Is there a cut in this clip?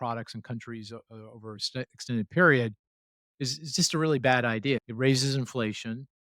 yes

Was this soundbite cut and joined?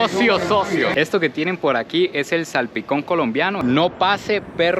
yes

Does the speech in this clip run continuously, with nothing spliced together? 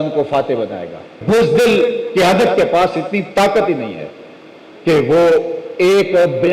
no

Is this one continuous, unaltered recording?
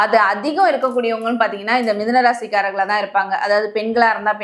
yes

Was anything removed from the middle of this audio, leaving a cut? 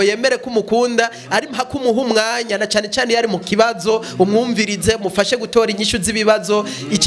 no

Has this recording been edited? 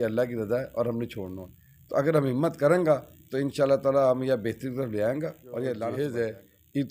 yes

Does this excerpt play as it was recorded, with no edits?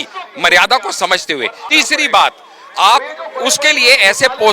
no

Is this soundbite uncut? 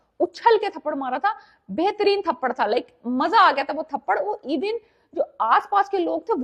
yes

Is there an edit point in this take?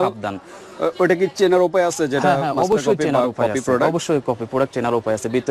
no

